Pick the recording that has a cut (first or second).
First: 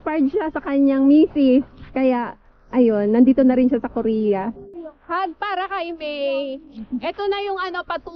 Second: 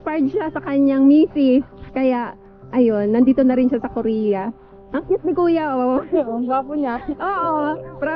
first